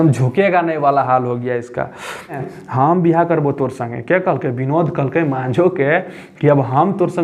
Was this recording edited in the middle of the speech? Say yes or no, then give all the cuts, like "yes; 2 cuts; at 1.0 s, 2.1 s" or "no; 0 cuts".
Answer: yes; 1 cut; at 2.4 s